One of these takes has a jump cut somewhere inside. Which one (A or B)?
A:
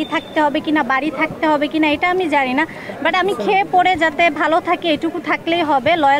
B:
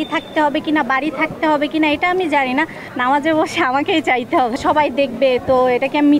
B